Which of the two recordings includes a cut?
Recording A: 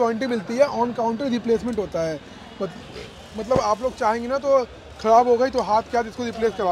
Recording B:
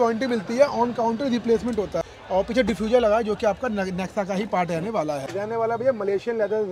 B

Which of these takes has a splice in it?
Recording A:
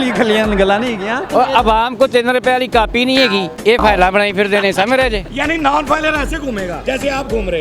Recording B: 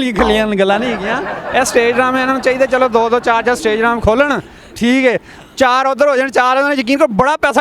A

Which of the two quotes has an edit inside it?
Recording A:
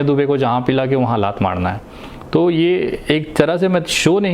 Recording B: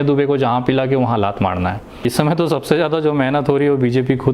B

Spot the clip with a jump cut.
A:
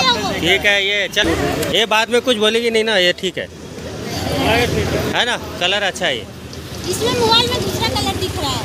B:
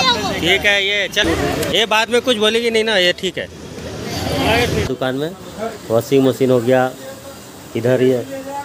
B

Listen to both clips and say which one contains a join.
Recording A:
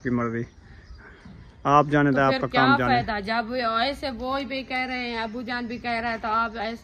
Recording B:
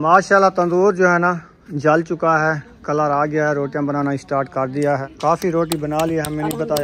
B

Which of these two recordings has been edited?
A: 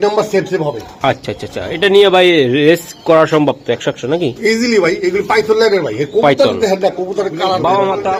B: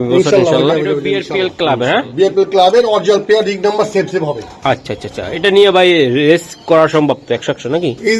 B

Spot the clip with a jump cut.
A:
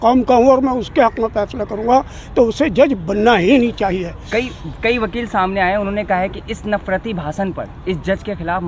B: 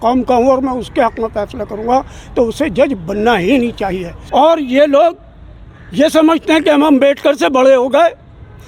B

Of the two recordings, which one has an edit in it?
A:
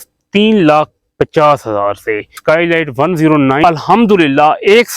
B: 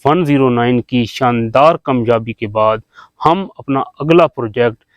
A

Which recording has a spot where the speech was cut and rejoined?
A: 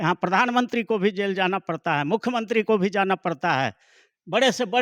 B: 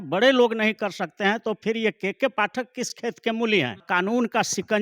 B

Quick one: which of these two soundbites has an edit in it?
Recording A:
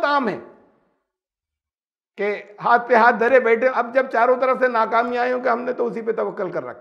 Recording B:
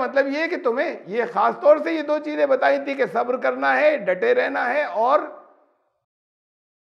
A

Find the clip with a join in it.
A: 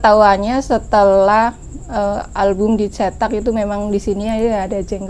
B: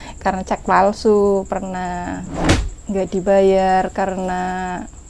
B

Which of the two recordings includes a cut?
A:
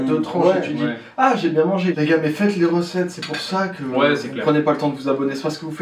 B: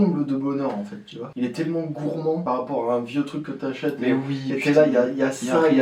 A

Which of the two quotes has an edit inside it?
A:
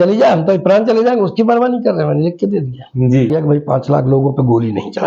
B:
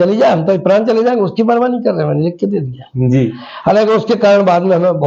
A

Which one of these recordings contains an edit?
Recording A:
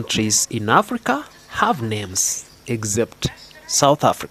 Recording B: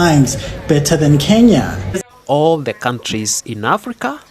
B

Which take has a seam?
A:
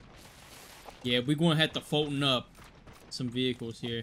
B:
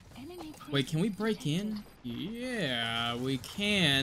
B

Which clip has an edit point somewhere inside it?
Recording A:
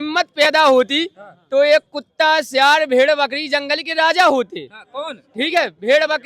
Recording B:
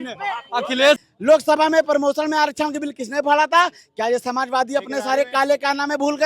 B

